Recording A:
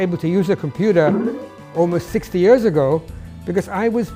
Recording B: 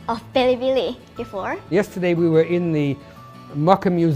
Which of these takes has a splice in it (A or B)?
B